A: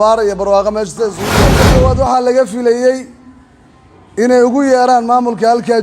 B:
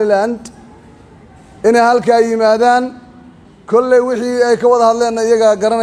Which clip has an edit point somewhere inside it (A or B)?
A